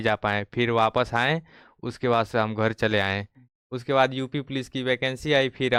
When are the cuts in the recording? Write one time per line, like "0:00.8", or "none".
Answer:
none